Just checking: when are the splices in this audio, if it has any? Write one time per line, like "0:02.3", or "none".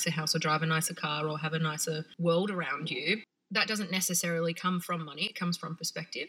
0:02.1
0:03.4